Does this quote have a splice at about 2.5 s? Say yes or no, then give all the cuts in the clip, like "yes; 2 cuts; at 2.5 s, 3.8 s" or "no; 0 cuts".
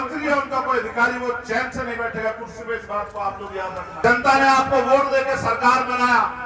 no; 1 cut; at 4.0 s